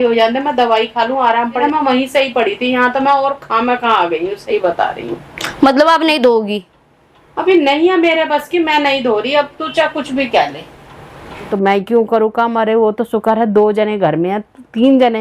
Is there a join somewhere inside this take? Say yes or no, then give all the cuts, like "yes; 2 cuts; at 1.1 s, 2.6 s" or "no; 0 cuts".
yes; 2 cuts; at 1.6 s, 11.5 s